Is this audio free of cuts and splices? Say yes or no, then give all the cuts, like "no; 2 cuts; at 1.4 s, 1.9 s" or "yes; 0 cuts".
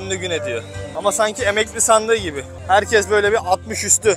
no; 2 cuts; at 0.9 s, 2.5 s